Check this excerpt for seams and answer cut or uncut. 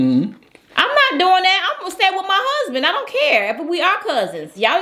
uncut